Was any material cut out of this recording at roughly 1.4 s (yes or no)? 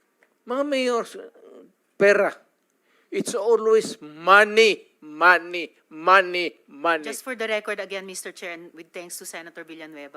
no